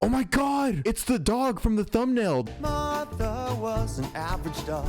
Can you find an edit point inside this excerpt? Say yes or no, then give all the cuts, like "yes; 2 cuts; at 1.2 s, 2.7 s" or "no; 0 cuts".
yes; 1 cut; at 2.4 s